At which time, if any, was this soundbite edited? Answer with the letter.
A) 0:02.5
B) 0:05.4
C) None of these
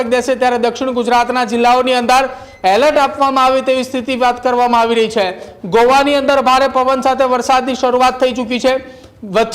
C